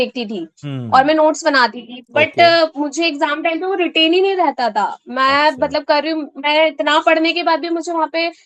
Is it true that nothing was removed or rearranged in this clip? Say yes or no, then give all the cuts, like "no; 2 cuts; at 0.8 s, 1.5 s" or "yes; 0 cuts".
yes; 0 cuts